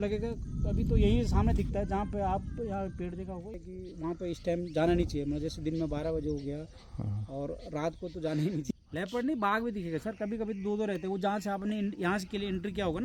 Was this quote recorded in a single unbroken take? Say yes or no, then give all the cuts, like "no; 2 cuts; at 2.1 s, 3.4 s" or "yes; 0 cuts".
no; 2 cuts; at 3.6 s, 8.6 s